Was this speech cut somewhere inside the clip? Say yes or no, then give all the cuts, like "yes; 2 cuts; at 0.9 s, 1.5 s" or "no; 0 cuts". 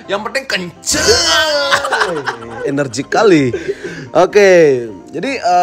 no; 0 cuts